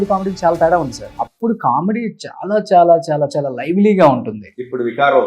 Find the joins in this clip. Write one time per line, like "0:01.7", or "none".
0:01.0